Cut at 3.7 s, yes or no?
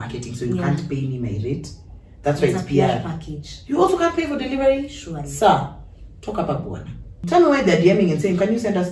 no